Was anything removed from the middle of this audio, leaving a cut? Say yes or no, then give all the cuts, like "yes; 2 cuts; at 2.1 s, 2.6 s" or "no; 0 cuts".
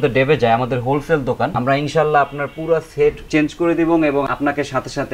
no; 0 cuts